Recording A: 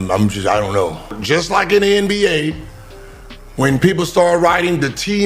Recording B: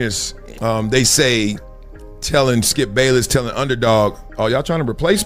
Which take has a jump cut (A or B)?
A